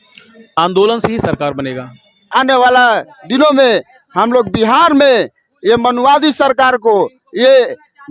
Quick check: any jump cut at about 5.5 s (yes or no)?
no